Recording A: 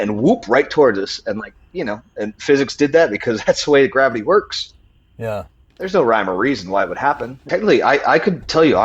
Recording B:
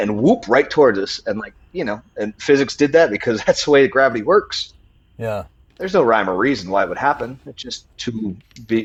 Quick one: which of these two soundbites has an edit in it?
A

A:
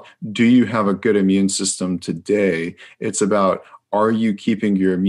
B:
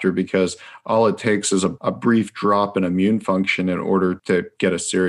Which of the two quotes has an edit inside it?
B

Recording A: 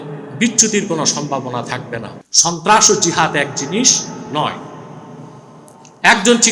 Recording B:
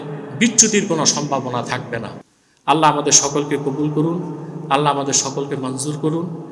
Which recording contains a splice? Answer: A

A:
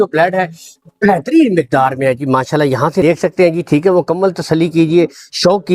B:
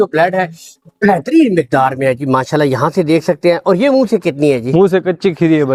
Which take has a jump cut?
A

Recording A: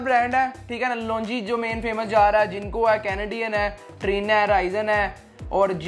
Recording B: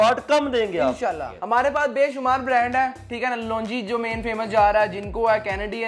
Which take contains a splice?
B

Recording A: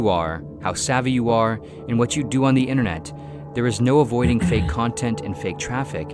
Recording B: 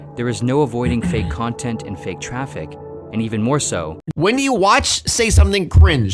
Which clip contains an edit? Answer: B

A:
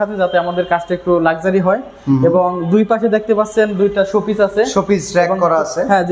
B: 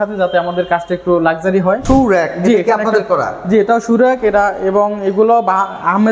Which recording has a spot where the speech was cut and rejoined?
B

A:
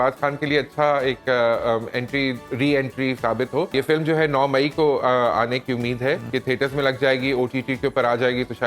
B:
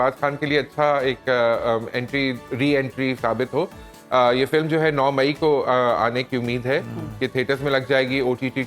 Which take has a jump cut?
A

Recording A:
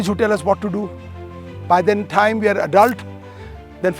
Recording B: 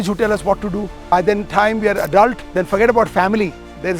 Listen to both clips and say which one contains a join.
B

